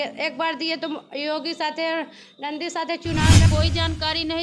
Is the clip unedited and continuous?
no; 1 cut; at 3.4 s

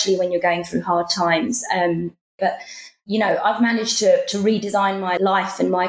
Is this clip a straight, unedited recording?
no; 1 cut; at 2.4 s

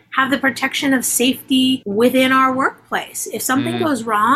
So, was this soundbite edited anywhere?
yes; 1 cut; at 1.8 s

